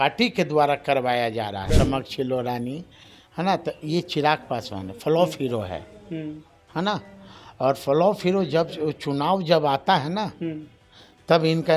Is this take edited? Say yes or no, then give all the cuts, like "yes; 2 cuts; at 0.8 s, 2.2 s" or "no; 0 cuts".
yes; 1 cut; at 1.7 s